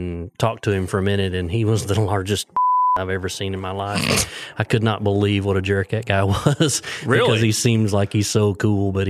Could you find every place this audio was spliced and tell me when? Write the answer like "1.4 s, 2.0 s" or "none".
none